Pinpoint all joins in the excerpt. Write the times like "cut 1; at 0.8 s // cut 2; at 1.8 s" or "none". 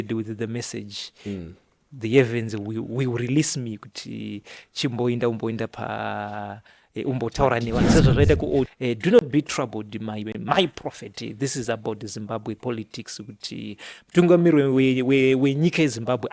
cut 1; at 8.7 s

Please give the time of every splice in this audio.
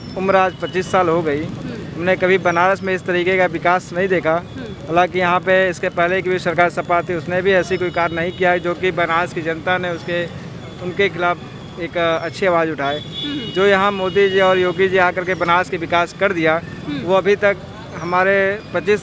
none

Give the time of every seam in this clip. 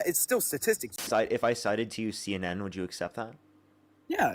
cut 1; at 1.1 s

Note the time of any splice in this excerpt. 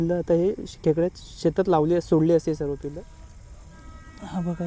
cut 1; at 2.8 s

